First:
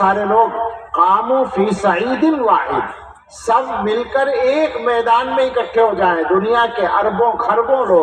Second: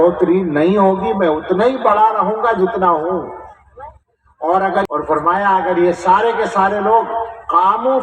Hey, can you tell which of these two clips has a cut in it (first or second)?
second